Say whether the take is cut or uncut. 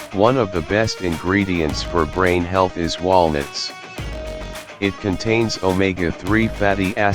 uncut